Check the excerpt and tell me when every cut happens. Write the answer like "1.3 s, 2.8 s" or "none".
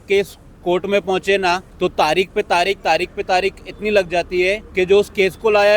1.7 s, 4.6 s